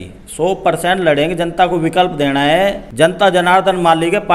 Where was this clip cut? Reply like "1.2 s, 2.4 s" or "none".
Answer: 2.8 s